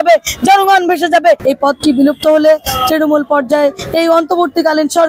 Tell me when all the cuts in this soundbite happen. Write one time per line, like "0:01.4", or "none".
0:01.4